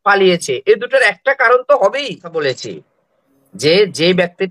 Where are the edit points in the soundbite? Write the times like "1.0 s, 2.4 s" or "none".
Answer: 2.2 s